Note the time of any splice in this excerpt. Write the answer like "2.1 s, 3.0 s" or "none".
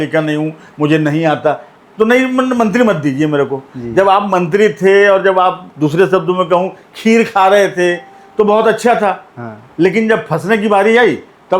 none